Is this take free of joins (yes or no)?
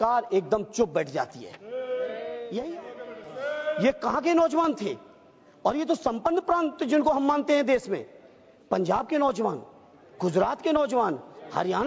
no